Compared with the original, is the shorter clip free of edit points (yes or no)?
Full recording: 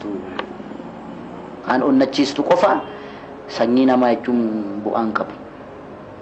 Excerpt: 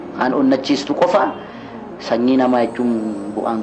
yes